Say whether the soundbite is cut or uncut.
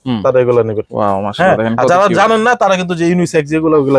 uncut